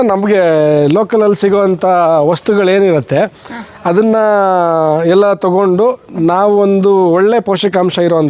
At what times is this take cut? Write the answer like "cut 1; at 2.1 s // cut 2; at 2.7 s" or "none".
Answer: none